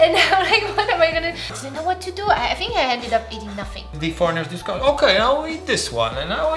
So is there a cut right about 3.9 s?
yes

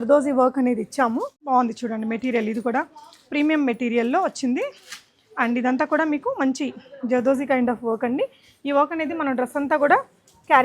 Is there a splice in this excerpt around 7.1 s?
no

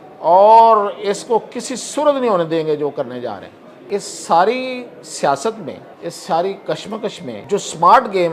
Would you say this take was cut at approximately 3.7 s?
yes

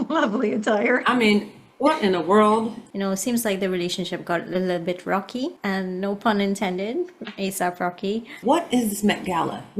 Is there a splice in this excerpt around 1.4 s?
no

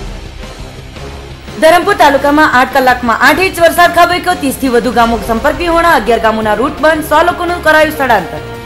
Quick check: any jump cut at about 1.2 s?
yes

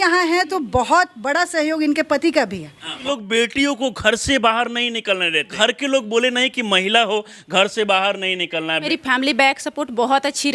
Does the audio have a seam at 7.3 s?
no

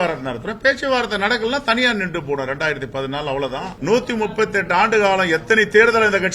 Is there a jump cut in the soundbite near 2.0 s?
no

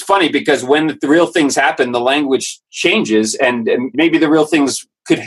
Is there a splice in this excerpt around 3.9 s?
yes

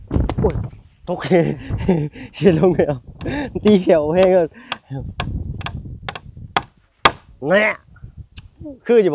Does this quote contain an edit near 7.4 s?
no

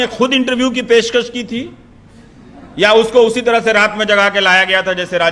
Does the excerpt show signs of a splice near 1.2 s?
no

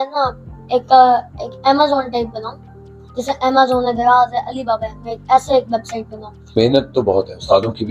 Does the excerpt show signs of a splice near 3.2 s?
no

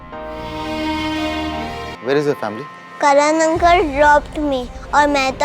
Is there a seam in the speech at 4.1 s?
no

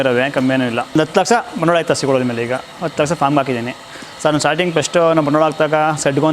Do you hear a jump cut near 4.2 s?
no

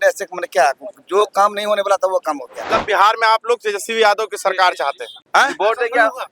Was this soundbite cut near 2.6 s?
yes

